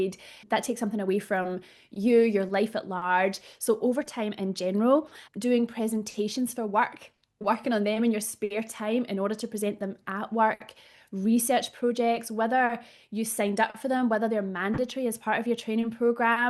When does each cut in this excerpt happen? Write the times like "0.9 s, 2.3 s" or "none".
none